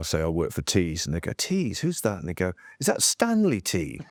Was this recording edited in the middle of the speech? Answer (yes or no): no